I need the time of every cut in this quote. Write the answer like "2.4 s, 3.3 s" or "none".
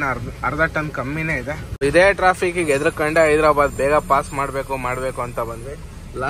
1.8 s